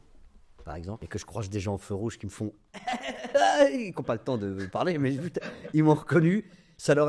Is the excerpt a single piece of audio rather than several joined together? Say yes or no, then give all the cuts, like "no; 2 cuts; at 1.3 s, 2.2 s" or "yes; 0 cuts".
no; 1 cut; at 1.0 s